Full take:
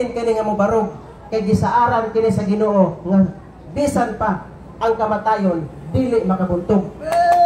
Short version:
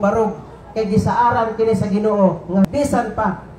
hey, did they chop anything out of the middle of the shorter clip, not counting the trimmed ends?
yes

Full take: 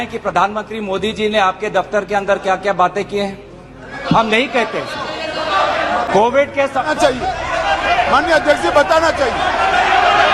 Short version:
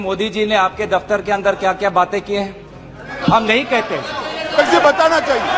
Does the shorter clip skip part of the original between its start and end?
yes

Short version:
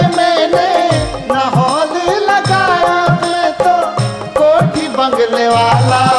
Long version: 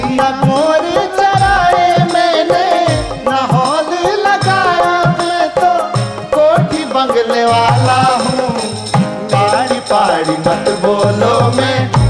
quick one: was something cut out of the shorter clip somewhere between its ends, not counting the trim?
no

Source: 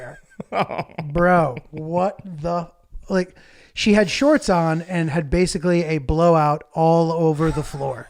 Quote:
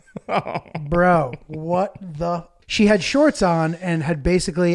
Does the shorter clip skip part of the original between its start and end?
yes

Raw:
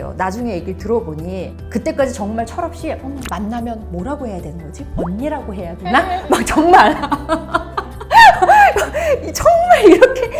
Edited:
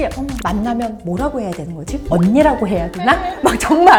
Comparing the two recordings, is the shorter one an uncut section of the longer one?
yes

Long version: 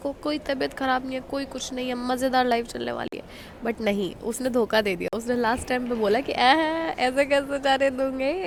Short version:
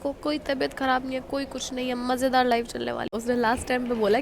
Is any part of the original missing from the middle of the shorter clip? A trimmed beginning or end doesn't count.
yes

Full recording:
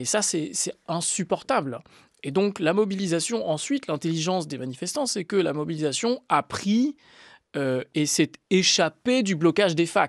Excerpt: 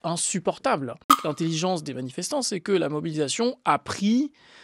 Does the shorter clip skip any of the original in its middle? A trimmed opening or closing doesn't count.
yes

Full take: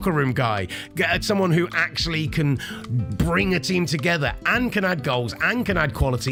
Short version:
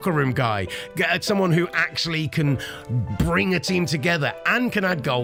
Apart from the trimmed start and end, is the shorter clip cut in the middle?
no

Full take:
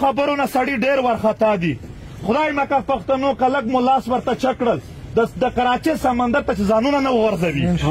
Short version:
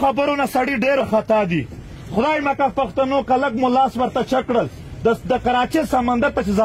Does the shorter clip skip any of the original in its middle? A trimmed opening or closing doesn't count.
yes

